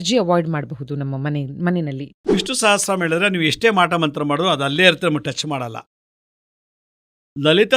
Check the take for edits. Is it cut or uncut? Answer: cut